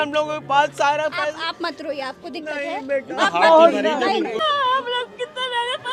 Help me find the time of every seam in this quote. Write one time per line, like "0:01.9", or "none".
0:04.4